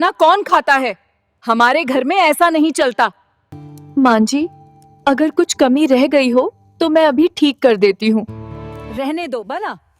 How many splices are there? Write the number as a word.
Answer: two